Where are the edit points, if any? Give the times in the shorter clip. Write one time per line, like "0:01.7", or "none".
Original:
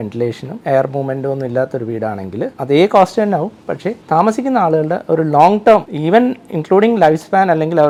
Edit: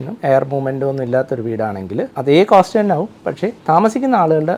none